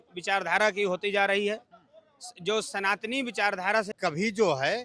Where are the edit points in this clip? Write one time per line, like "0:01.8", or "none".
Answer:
0:03.9